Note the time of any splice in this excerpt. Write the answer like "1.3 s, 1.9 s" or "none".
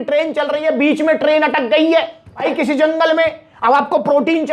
2.4 s